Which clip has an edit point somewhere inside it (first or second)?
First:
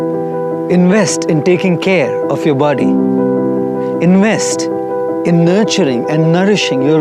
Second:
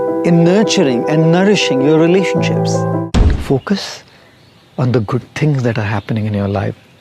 second